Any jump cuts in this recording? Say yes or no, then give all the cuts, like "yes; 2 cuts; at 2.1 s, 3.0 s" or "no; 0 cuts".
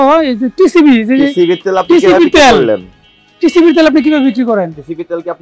no; 0 cuts